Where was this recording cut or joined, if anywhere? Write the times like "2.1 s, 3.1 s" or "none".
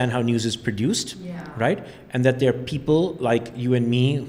none